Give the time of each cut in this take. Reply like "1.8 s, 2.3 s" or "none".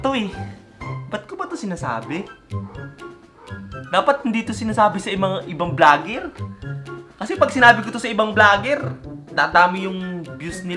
none